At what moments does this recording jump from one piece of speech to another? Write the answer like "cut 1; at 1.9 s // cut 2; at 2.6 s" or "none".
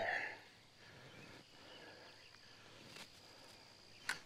none